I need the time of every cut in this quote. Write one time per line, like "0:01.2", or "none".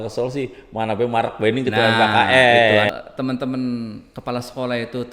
0:02.9